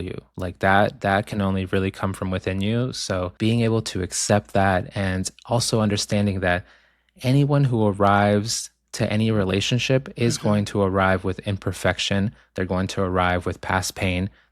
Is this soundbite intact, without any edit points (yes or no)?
no